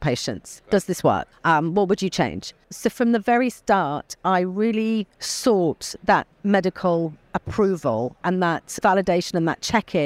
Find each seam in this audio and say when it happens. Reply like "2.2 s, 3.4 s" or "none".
1.3 s, 2.7 s, 5.2 s, 6.3 s, 8.4 s